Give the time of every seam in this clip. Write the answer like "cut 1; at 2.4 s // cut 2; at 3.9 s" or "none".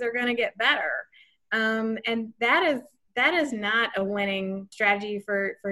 cut 1; at 4.7 s